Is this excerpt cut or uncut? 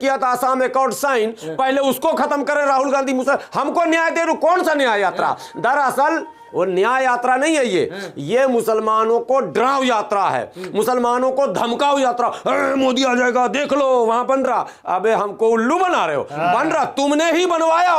uncut